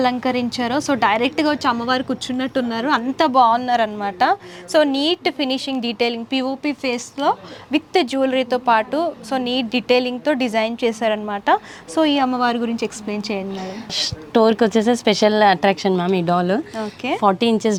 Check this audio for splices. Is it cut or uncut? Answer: uncut